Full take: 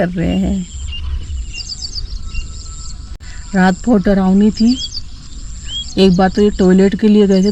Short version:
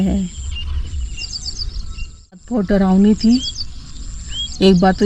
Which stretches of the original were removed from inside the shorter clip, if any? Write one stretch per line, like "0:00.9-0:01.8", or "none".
0:02.8-0:03.8